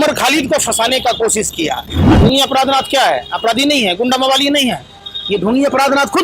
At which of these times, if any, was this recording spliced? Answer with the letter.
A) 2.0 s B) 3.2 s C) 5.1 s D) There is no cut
A